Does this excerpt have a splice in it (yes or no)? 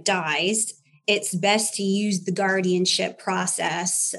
no